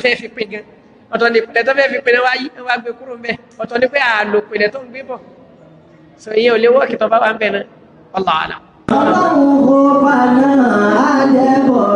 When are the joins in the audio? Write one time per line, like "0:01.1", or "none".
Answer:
0:08.9